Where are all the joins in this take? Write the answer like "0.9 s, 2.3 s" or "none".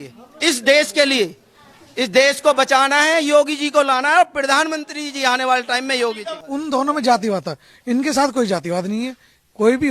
6.3 s

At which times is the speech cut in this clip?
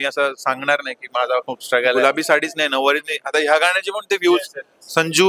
2.0 s

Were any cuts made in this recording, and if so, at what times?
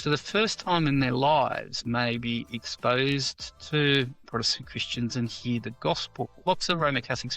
6.4 s

